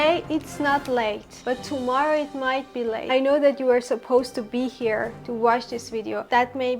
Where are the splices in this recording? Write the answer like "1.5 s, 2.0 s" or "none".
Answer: 3.0 s